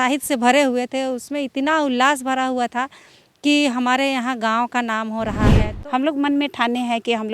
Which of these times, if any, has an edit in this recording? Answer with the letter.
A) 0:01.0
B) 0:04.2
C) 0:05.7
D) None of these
C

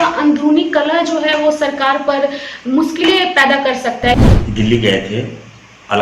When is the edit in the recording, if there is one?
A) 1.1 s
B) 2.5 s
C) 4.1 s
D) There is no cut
C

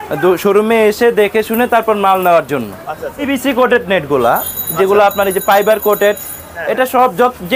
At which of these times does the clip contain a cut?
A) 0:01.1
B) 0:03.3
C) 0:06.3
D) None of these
B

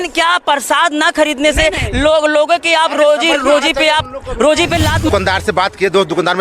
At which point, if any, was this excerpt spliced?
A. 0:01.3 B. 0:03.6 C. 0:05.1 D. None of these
C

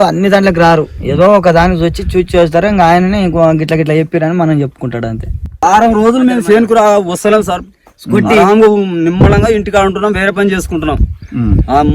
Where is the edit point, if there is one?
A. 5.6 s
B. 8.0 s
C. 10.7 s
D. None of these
A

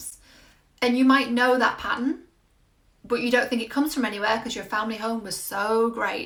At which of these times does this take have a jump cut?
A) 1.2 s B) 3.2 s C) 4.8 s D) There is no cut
D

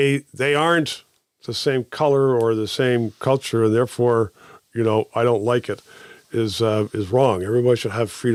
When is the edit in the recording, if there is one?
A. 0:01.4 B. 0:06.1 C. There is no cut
C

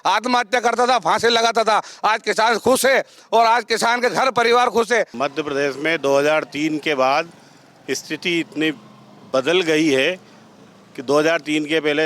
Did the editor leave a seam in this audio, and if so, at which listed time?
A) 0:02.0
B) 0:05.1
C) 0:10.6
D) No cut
B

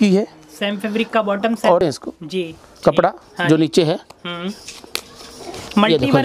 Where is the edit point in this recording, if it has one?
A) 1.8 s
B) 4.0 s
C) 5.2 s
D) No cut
A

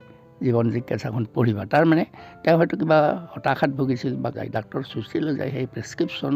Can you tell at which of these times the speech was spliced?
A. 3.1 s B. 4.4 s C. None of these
B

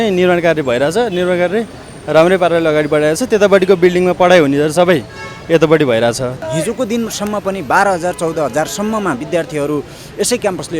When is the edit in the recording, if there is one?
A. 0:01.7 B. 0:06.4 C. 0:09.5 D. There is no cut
B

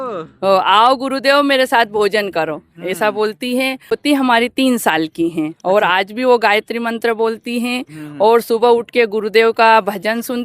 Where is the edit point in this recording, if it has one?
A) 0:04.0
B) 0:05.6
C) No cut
A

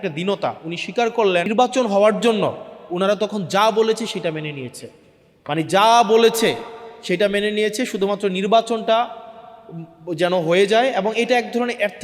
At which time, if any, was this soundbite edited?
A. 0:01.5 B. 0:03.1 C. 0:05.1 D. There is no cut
A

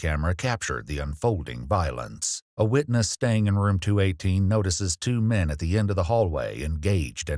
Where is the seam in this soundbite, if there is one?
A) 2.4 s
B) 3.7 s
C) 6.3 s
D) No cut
D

